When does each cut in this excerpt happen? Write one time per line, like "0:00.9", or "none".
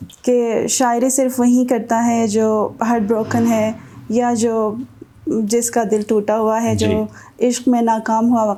none